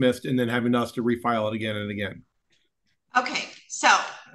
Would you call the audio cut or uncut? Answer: uncut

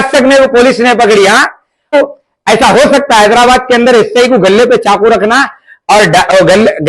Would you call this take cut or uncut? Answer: cut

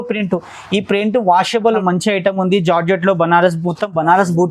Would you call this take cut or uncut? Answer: cut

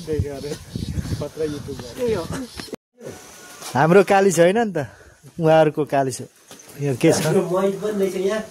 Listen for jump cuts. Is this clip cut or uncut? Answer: uncut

